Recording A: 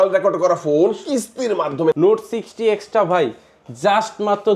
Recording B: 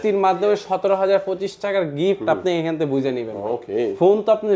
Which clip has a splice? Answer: A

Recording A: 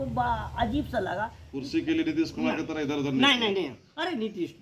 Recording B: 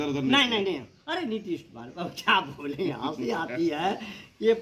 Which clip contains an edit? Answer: A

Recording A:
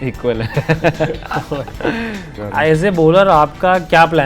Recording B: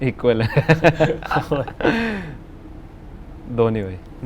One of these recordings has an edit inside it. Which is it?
A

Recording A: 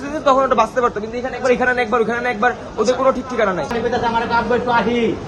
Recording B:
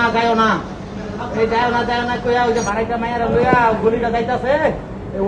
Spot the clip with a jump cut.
A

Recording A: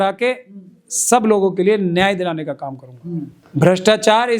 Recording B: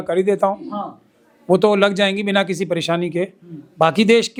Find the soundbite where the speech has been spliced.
A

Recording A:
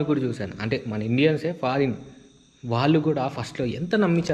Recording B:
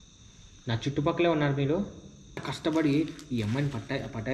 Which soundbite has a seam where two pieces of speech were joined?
B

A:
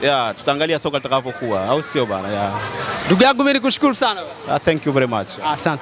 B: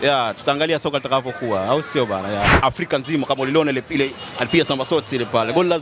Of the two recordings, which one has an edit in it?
B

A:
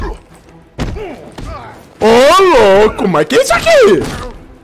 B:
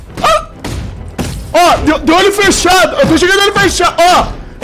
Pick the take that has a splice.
B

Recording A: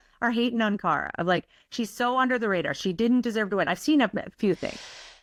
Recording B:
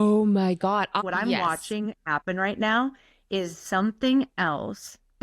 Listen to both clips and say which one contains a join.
B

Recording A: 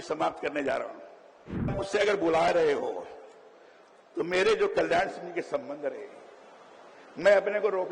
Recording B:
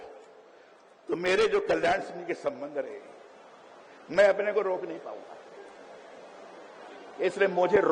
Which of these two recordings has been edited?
A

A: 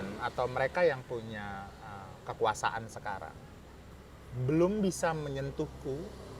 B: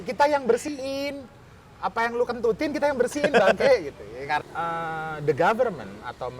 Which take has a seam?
B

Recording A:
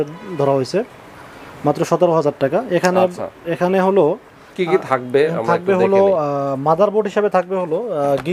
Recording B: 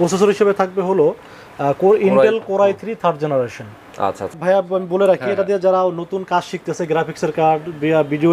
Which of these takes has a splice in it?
B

